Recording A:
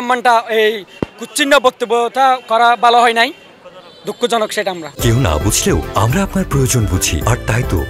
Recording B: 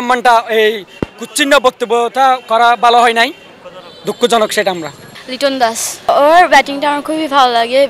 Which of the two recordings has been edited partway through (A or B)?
B